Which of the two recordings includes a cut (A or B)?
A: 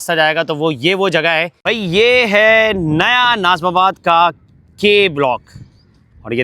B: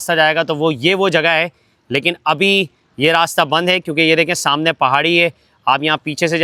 A